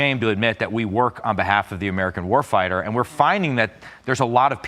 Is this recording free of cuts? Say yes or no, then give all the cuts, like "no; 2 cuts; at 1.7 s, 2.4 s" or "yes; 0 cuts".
yes; 0 cuts